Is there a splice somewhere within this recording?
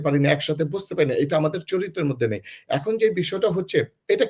no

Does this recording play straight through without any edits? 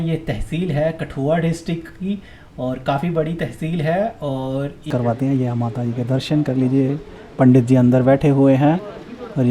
no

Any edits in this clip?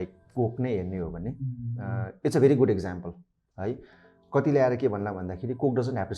no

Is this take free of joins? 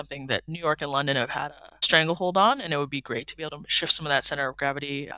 yes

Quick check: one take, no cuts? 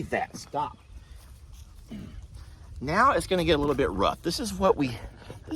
yes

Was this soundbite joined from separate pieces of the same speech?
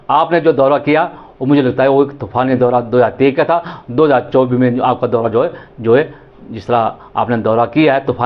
no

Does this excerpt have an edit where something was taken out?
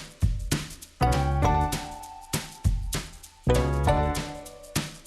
no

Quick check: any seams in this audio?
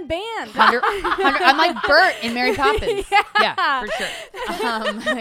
yes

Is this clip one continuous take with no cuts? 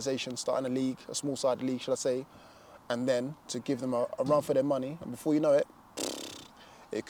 yes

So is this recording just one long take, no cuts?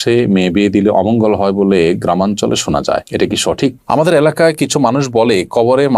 no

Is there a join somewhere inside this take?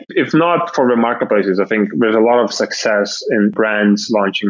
yes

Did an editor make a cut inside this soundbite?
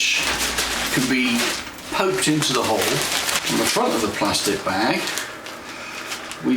yes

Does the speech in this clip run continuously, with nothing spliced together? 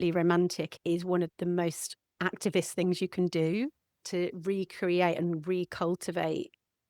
no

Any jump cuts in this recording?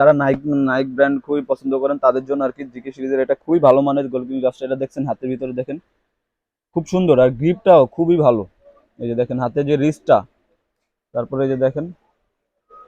no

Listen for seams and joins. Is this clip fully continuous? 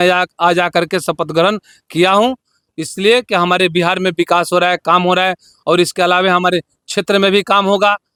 yes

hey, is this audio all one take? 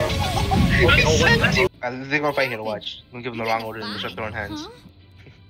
no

